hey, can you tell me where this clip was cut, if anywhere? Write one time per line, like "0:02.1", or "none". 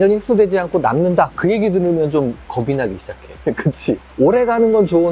none